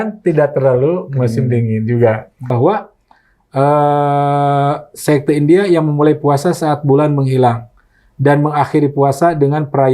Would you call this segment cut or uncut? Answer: cut